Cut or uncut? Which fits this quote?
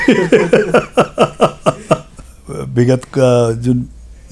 cut